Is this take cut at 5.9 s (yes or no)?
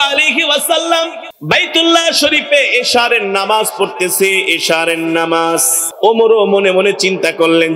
yes